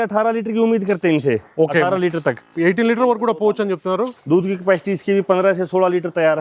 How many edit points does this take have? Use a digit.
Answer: 1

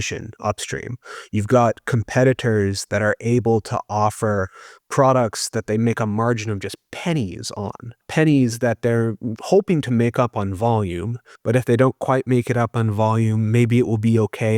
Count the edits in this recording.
1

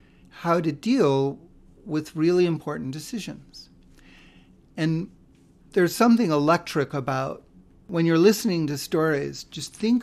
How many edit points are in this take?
1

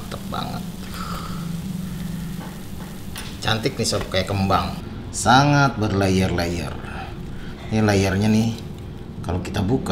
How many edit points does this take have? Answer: 1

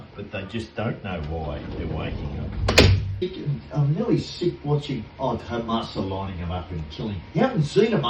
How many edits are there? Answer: 1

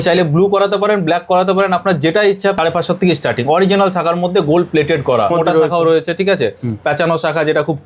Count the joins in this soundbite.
2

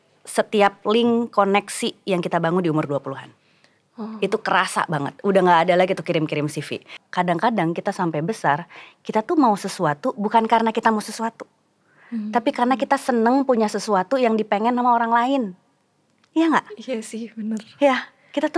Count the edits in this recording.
1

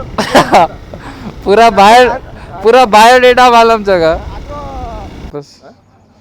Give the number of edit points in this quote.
1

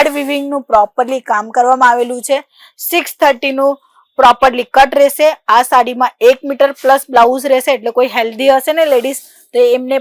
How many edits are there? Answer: 0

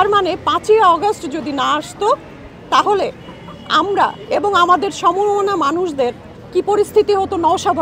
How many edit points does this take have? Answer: 0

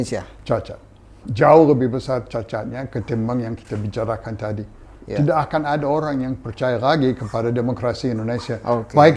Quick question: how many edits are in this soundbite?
1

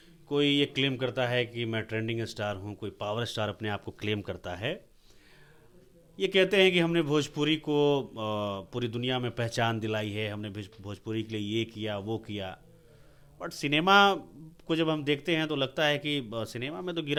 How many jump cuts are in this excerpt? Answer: 0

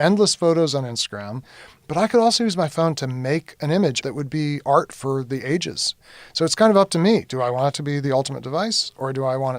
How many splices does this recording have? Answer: 3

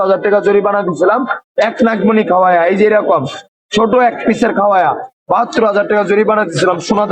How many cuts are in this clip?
0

